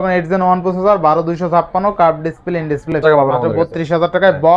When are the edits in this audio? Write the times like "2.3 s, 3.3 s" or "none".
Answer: 3.0 s